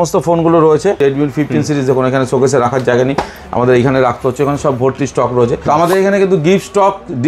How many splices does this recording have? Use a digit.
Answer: 2